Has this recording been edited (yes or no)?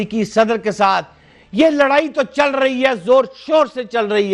no